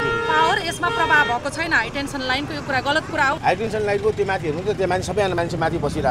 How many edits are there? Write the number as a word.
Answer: one